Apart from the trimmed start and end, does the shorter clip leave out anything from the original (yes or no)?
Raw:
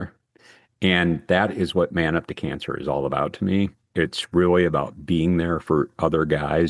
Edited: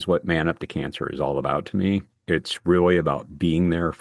no